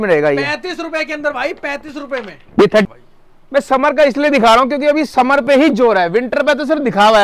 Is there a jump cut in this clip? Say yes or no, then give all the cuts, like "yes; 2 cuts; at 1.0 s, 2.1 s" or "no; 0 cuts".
yes; 1 cut; at 2.9 s